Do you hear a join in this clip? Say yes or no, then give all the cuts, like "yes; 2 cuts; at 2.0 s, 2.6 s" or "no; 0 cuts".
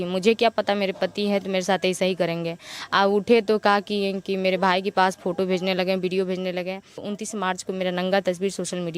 yes; 1 cut; at 7.1 s